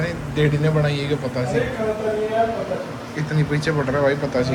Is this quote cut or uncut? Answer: uncut